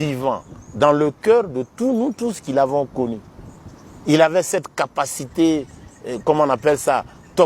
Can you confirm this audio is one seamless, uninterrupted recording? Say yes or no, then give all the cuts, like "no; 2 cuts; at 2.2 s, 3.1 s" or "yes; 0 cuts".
yes; 0 cuts